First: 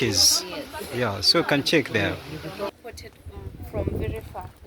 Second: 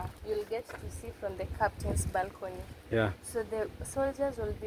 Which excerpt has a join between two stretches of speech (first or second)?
first